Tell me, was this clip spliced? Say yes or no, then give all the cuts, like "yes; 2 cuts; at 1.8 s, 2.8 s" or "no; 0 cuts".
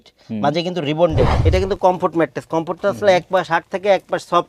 yes; 1 cut; at 1.4 s